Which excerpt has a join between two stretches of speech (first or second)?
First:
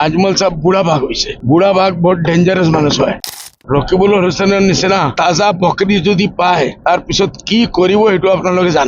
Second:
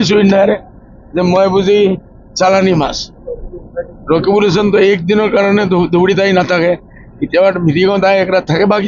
first